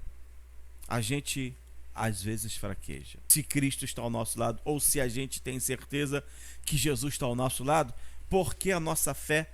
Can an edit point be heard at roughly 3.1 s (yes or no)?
yes